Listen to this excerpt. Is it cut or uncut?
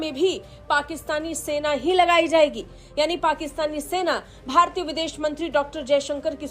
uncut